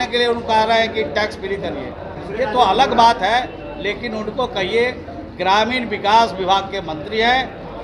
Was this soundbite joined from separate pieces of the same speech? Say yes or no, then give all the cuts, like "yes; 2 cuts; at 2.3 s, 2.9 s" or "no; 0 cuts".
no; 0 cuts